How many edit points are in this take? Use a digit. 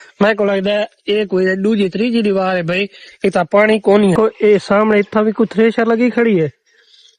1